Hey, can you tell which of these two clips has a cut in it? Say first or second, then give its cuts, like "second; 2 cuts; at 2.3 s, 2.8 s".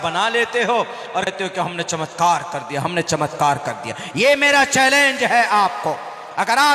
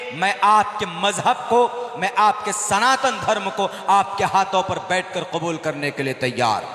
first; 1 cut; at 1.3 s